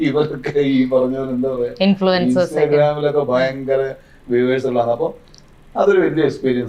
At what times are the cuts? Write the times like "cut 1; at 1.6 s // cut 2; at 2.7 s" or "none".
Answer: none